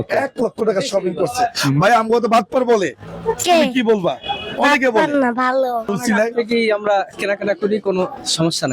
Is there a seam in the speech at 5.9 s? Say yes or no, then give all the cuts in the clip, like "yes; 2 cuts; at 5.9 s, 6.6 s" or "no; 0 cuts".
yes; 1 cut; at 5.9 s